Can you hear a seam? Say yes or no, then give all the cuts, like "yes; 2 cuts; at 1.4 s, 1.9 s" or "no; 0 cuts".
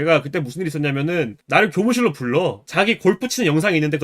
yes; 2 cuts; at 1.4 s, 2.6 s